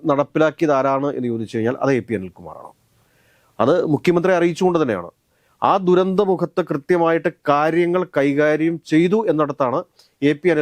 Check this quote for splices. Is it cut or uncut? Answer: uncut